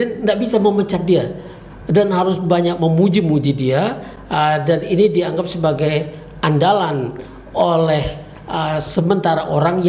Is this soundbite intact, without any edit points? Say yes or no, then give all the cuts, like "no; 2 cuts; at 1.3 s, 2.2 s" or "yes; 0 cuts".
yes; 0 cuts